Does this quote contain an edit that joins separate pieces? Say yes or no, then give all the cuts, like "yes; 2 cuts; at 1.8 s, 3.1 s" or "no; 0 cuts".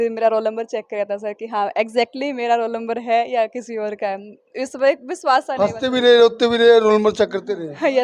no; 0 cuts